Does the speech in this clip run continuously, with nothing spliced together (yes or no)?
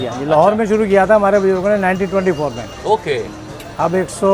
yes